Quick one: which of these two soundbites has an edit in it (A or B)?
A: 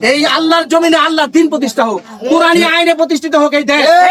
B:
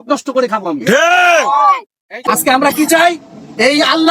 B